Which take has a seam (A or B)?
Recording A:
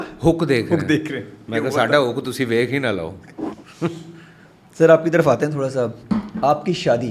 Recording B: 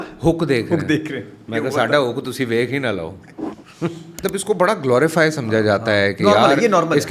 B